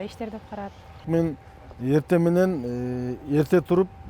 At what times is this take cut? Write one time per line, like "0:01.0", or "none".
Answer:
0:01.0